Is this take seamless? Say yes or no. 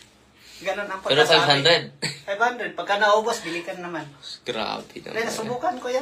yes